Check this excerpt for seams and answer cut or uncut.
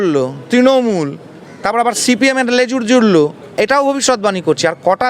cut